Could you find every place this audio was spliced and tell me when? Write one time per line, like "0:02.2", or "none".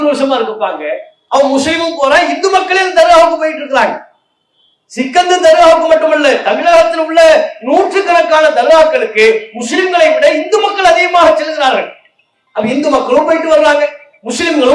0:01.1